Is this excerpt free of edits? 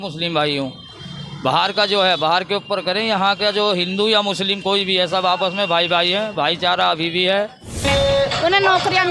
no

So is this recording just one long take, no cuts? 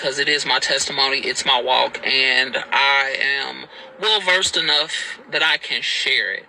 no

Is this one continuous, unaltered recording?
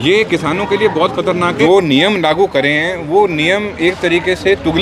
no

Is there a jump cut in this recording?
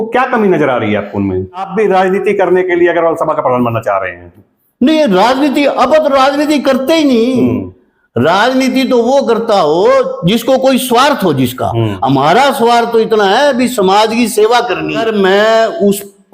yes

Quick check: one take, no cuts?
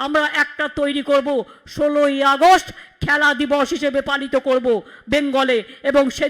yes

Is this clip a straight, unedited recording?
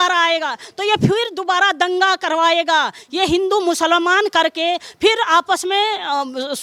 yes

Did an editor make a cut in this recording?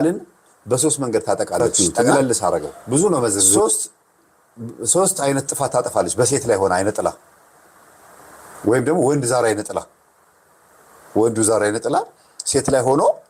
yes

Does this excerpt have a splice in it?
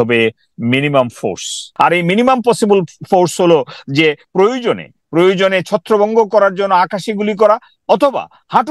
yes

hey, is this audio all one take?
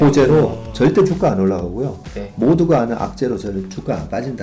yes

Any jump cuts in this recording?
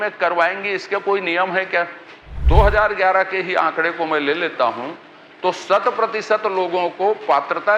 yes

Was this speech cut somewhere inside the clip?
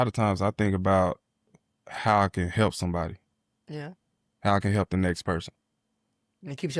no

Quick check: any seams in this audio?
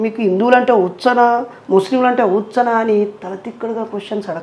no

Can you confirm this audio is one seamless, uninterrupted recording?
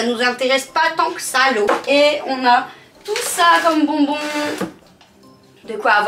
no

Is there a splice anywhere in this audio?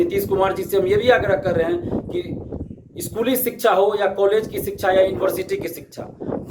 no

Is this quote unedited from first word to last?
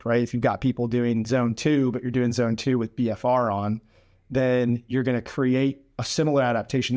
yes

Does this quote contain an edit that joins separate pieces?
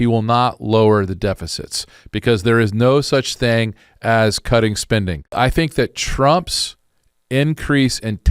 yes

